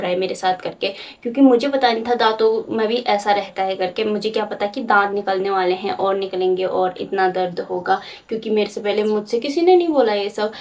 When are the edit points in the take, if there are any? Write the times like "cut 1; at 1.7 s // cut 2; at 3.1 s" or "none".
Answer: none